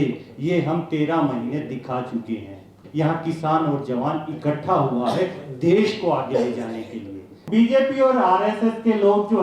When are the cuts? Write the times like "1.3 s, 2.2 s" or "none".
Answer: 2.8 s, 7.4 s

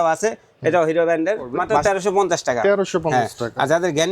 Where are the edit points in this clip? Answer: 1.8 s

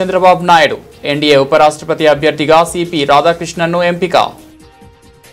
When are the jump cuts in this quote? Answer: 4.3 s

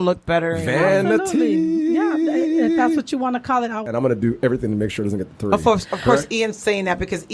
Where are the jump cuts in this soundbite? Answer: 3.8 s

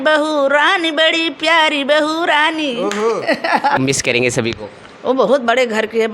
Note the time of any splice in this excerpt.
3.8 s

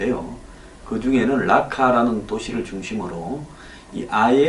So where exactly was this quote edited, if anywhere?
3.3 s

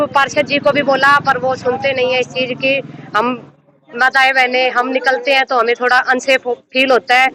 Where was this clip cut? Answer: none

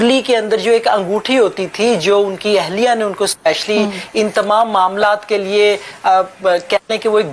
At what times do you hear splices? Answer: none

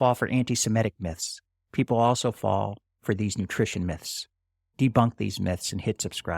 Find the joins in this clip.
4.7 s

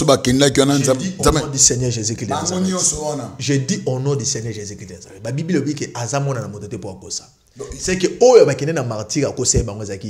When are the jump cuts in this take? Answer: none

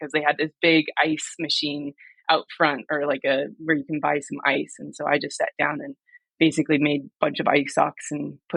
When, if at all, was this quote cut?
none

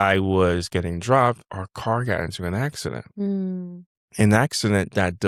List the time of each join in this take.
none

